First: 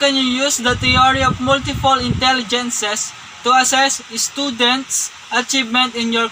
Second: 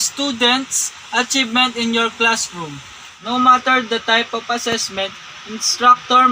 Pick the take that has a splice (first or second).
second